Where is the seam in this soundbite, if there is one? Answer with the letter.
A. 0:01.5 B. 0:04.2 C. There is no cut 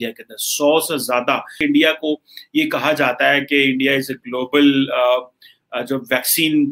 A